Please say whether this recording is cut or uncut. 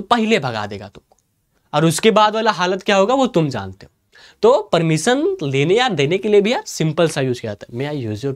uncut